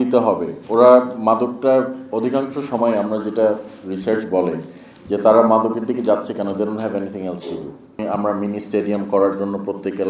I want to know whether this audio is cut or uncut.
cut